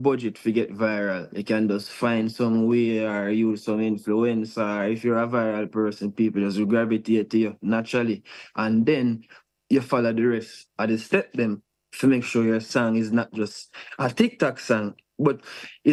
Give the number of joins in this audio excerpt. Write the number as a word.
zero